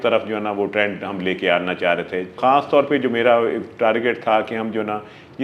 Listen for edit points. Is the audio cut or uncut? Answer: cut